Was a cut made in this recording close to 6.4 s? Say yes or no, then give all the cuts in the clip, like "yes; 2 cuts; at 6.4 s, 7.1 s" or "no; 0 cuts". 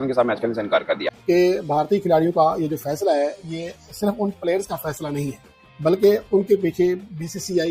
no; 1 cut; at 1.1 s